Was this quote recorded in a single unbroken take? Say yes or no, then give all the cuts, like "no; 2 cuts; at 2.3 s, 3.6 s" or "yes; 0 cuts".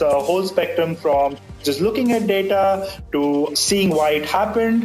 no; 1 cut; at 3.5 s